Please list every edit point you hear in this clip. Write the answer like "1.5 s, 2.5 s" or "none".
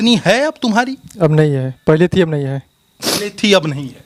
none